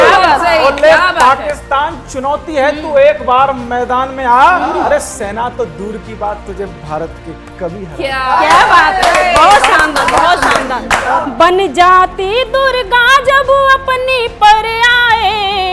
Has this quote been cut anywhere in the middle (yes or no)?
yes